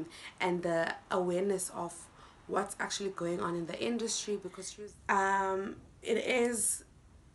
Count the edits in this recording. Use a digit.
1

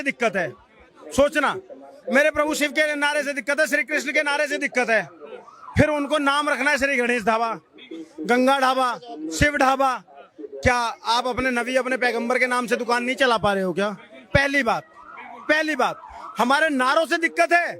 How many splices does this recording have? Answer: 0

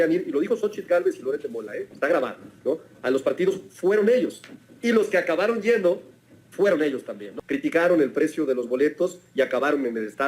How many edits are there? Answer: 1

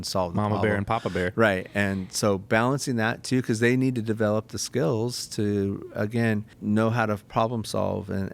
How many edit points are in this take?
1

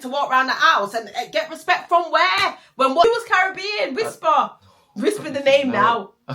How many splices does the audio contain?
1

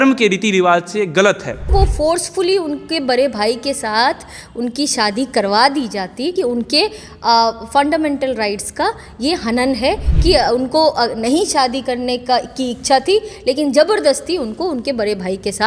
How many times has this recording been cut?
2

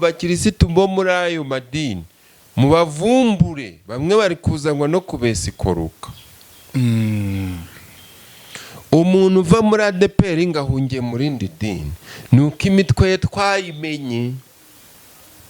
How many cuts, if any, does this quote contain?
0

